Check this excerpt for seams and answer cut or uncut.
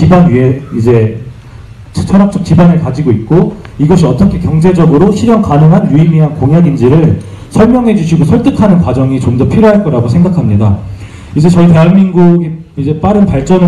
cut